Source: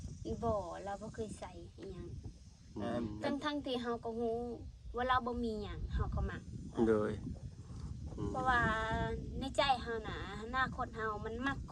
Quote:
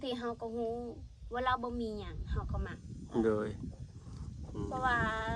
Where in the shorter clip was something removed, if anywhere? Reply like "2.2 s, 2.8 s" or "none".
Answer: none